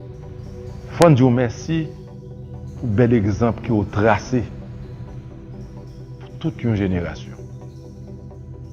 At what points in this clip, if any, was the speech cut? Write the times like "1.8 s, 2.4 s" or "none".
0.9 s, 7.6 s